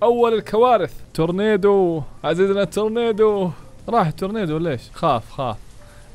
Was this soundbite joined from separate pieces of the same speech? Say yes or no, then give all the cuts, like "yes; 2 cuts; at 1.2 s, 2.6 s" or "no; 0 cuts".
yes; 1 cut; at 4.9 s